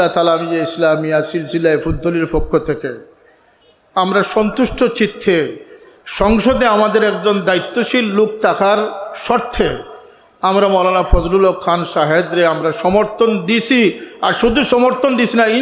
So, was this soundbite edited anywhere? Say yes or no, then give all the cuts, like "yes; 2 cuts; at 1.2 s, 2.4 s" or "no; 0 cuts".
no; 0 cuts